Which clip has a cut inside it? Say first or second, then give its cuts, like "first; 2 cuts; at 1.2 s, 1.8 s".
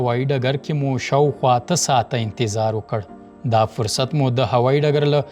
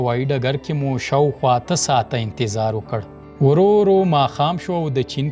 second; 1 cut; at 3.2 s